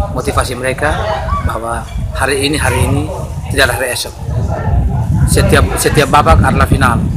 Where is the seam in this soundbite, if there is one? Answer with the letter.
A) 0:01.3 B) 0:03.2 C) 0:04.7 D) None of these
D